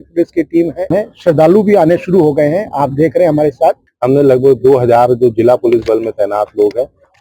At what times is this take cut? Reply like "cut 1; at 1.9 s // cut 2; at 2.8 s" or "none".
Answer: cut 1; at 0.9 s // cut 2; at 3.9 s